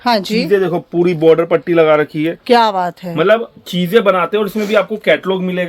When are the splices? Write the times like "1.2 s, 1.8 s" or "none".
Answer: none